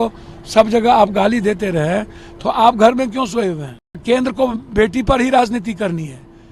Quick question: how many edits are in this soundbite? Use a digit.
1